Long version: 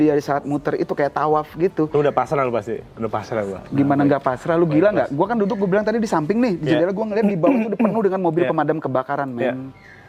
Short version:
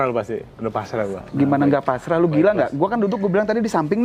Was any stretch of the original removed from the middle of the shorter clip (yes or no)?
no